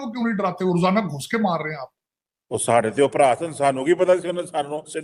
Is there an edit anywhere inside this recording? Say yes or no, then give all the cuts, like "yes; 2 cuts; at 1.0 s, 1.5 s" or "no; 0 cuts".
no; 0 cuts